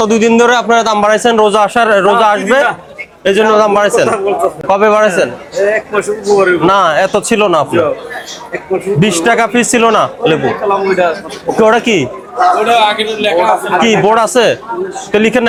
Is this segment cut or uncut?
uncut